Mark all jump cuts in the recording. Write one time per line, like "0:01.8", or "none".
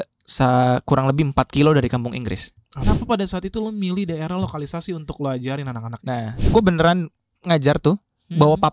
0:02.8
0:06.5